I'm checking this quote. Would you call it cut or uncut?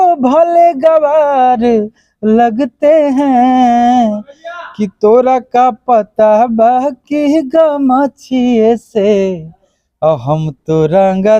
uncut